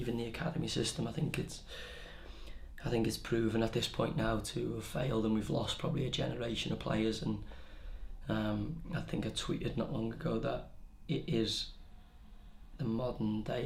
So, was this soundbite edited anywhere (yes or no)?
no